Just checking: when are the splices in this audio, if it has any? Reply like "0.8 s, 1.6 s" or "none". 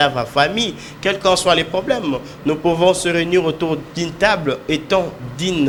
none